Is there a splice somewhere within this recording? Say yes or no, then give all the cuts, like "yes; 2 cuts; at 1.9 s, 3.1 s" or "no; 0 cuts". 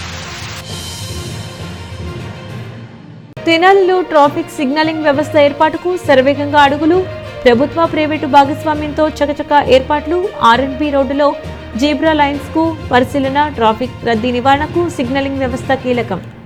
no; 0 cuts